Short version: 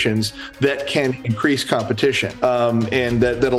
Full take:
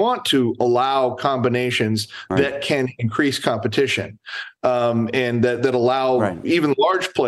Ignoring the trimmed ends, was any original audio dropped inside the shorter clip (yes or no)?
yes